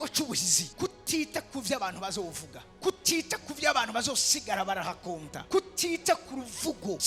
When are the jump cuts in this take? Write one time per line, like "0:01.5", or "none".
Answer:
none